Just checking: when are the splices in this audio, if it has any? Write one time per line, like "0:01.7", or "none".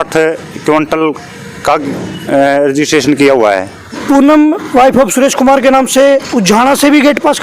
0:04.0